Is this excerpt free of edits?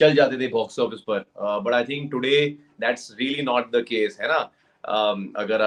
yes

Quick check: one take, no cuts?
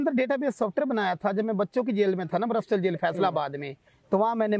yes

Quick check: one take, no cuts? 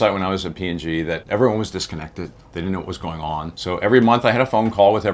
no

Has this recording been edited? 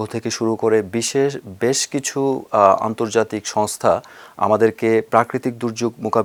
no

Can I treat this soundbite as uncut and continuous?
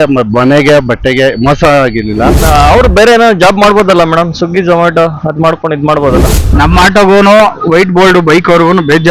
no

